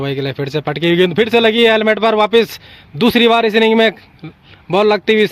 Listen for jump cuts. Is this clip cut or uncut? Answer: uncut